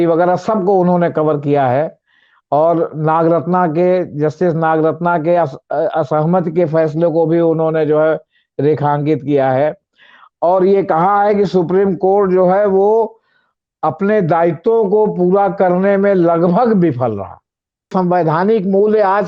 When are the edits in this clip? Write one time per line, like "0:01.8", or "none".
0:17.9